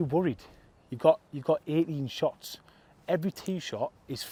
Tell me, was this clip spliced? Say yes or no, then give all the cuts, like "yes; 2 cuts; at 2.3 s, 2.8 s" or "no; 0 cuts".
no; 0 cuts